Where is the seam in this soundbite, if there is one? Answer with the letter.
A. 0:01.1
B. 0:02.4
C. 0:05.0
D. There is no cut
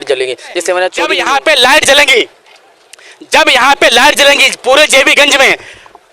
A